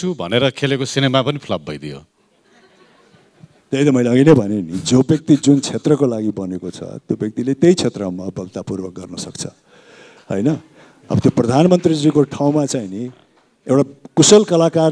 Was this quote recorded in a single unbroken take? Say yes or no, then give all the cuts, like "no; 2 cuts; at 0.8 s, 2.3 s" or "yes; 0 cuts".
yes; 0 cuts